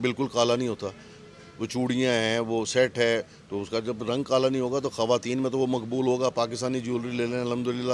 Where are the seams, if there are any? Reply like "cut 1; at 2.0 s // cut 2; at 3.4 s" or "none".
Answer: none

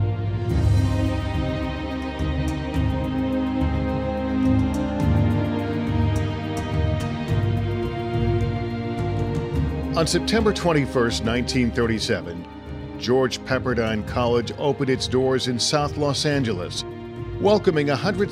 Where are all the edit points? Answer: cut 1; at 12.0 s

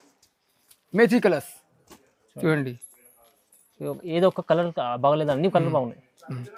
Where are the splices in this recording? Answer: none

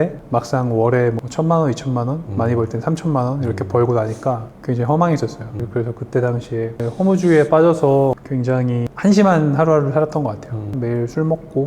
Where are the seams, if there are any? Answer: cut 1; at 6.8 s // cut 2; at 8.6 s // cut 3; at 10.8 s

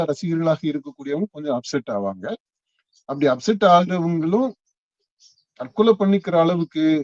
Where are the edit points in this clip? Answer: none

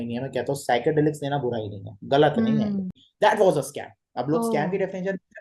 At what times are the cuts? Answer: cut 1; at 3.0 s

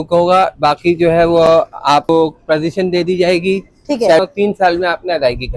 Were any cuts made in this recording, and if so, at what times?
cut 1; at 2.1 s // cut 2; at 4.2 s

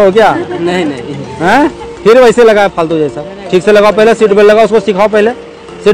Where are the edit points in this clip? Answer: none

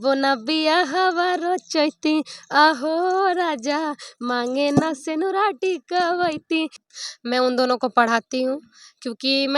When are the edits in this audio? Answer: cut 1; at 6.8 s

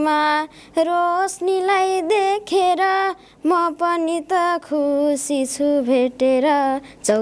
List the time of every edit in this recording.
none

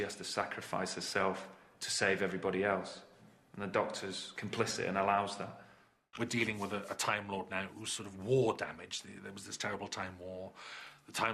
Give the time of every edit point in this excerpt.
cut 1; at 6.1 s

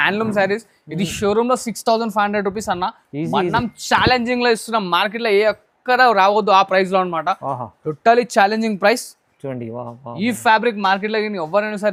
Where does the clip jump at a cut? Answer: none

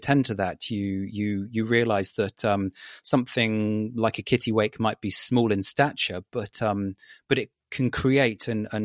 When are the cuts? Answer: none

